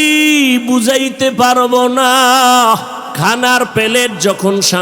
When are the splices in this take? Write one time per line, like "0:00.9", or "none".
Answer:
0:03.0